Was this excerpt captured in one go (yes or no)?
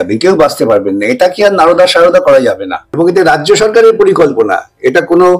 no